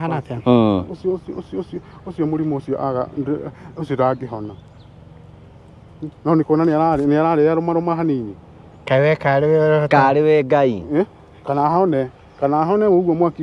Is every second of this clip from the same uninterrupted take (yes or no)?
yes